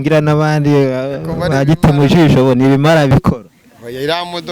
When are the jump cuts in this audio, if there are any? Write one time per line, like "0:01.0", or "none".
0:03.1